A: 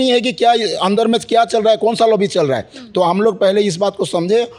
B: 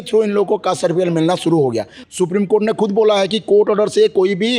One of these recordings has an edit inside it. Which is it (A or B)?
B